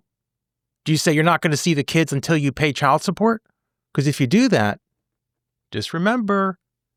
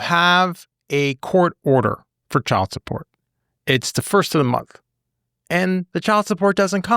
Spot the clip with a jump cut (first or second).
second